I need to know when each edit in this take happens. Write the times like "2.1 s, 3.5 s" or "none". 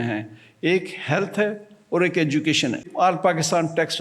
2.8 s